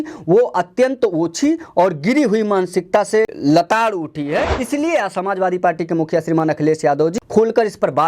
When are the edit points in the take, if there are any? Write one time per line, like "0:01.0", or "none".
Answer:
0:03.3
0:04.6
0:07.1